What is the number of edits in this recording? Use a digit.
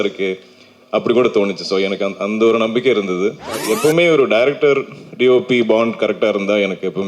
1